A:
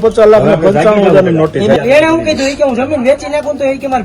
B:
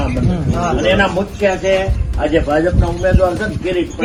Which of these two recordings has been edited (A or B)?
A